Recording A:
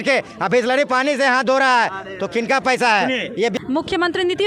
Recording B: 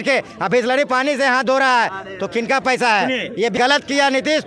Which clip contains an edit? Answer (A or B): B